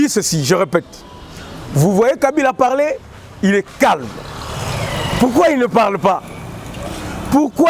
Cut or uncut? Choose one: uncut